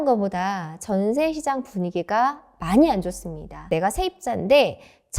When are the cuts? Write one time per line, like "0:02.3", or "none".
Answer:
0:03.7